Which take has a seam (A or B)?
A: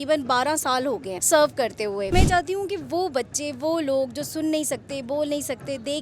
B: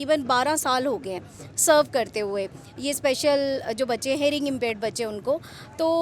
A